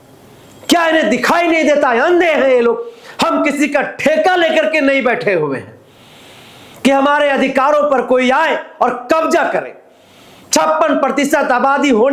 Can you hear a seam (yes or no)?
yes